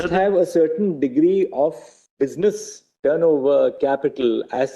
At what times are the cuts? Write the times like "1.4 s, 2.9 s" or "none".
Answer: none